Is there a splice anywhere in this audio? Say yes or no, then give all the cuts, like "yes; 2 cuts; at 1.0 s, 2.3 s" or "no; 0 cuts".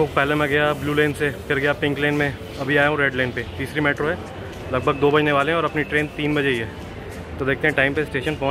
no; 0 cuts